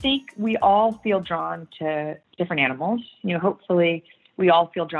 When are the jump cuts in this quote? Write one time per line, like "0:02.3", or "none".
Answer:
0:02.2